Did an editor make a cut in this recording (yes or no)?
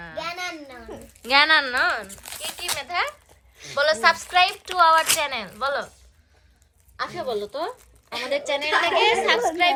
no